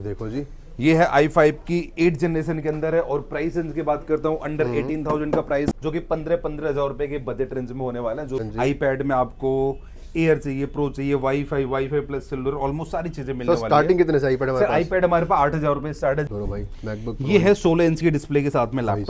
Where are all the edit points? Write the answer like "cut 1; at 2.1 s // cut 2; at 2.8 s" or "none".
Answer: cut 1; at 5.7 s // cut 2; at 8.4 s // cut 3; at 16.3 s